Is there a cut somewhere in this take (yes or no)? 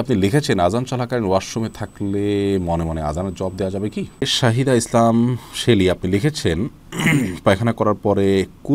yes